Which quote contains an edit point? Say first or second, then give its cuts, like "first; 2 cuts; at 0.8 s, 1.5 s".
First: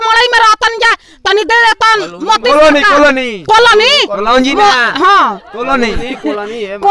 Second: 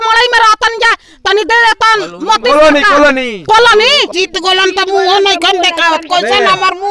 second; 1 cut; at 4.1 s